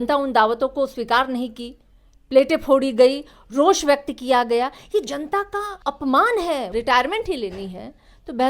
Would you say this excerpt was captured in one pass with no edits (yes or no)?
no